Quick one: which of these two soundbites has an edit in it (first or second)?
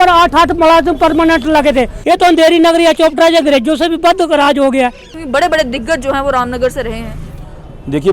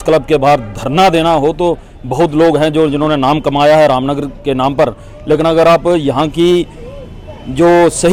first